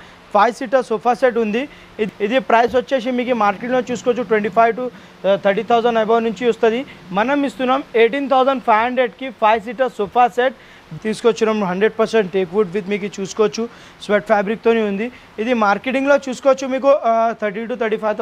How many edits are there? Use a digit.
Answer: 2